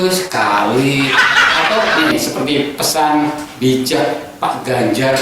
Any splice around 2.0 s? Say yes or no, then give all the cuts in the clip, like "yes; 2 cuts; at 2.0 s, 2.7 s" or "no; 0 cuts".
yes; 1 cut; at 2.0 s